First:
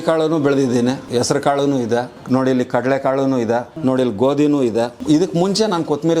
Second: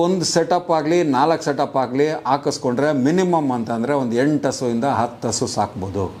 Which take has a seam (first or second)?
first